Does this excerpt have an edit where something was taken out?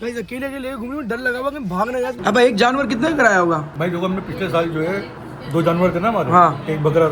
yes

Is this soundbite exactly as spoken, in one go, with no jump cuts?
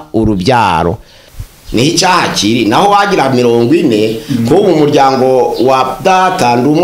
no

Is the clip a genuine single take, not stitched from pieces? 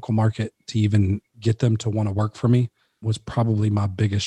no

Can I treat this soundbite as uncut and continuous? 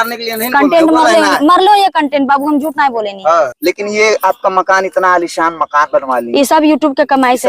no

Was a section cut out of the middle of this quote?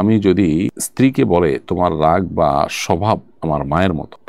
no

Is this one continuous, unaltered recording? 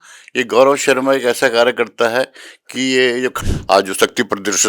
no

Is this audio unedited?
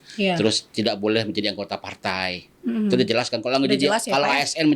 yes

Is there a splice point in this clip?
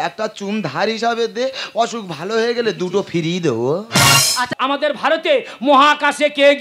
yes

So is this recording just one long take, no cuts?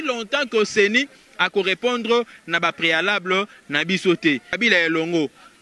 no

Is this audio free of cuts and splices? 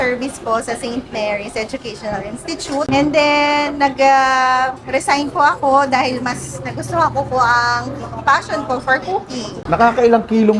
yes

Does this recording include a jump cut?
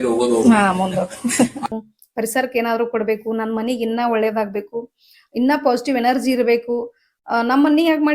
yes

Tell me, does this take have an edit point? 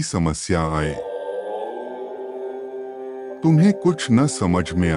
yes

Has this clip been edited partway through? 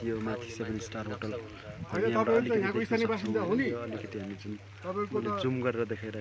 no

